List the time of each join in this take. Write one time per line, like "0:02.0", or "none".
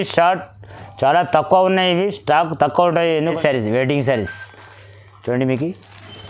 0:03.3